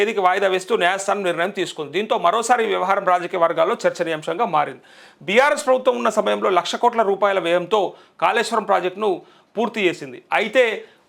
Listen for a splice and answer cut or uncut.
uncut